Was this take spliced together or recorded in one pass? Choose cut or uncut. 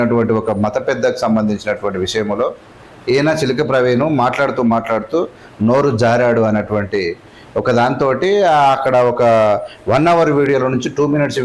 uncut